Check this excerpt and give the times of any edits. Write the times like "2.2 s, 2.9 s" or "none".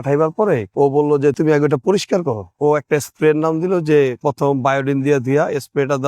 1.4 s, 2.5 s